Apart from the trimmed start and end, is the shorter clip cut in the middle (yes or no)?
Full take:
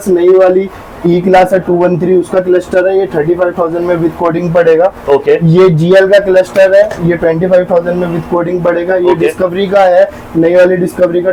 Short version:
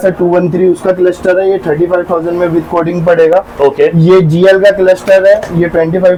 no